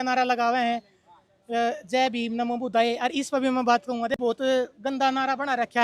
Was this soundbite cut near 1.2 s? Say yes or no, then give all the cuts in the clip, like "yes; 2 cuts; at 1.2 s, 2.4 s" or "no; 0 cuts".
no; 1 cut; at 4.1 s